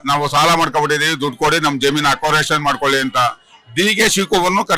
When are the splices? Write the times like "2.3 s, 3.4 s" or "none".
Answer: none